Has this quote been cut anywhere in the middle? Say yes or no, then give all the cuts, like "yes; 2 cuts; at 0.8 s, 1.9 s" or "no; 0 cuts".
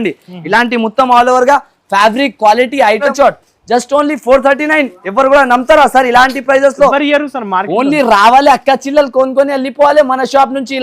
yes; 1 cut; at 3.1 s